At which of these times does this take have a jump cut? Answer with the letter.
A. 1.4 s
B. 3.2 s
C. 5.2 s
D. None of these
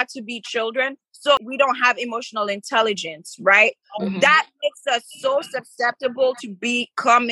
A